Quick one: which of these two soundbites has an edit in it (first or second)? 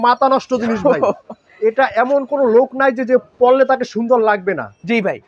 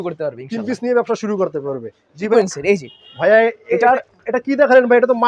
second